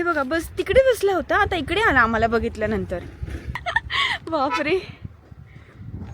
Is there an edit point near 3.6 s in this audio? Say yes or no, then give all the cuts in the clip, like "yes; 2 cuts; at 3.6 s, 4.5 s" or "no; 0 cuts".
yes; 1 cut; at 3.6 s